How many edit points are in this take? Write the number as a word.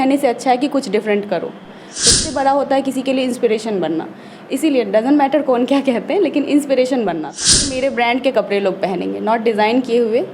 two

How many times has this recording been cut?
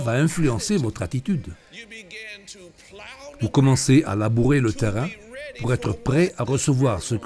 two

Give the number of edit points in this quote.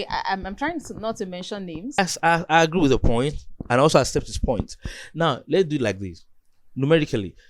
one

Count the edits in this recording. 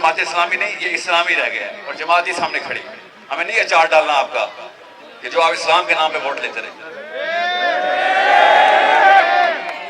zero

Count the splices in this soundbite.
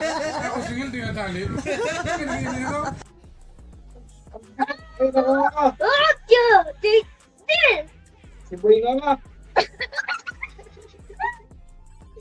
zero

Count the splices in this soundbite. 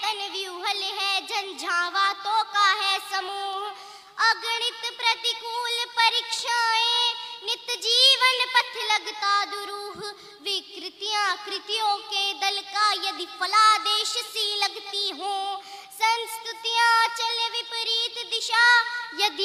zero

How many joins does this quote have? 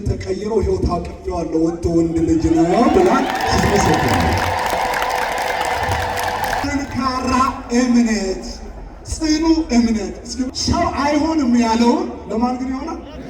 two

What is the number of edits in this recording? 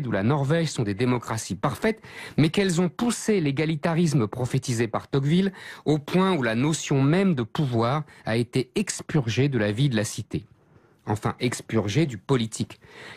one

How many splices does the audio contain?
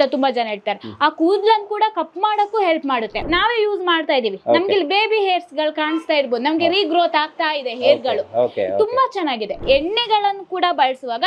two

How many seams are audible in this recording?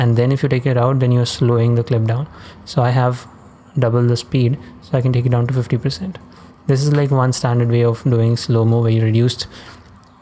zero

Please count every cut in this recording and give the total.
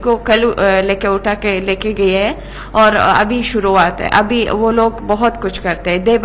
zero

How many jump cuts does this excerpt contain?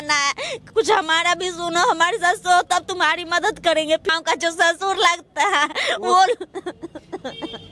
one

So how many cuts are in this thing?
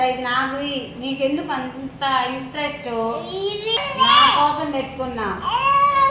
one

